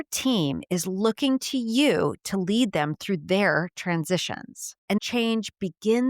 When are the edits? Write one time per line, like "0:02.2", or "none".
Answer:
0:05.0